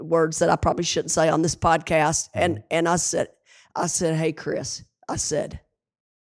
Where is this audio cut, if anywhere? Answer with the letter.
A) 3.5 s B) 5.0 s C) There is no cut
C